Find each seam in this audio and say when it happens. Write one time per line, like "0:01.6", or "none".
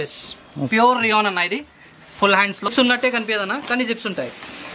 0:02.7